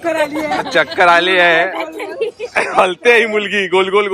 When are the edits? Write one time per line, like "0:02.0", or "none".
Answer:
none